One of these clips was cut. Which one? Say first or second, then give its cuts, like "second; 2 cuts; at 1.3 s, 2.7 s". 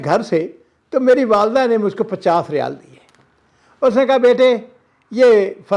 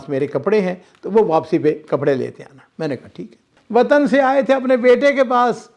second; 1 cut; at 3.5 s